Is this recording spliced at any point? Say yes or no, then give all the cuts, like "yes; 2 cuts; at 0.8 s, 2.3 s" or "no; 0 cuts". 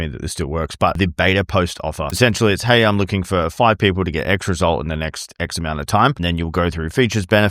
yes; 3 cuts; at 0.9 s, 2.2 s, 6.2 s